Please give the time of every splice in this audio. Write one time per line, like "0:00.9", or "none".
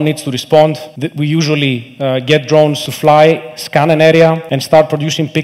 0:00.9
0:02.8
0:04.5